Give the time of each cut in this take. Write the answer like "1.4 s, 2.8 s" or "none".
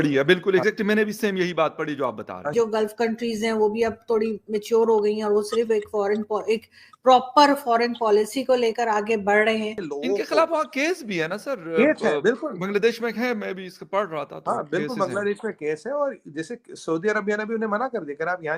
2.5 s, 9.9 s